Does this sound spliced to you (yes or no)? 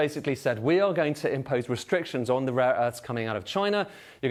no